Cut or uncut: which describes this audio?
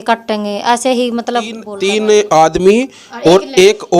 cut